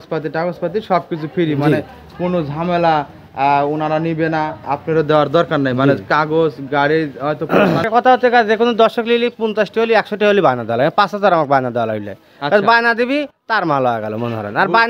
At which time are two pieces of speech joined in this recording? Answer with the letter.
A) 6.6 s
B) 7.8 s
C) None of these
B